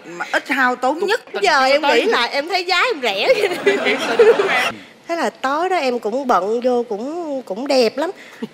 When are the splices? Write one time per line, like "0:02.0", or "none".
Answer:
0:01.3
0:04.6